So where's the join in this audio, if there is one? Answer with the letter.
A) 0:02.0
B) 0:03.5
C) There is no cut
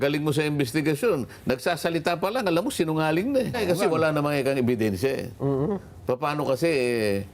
B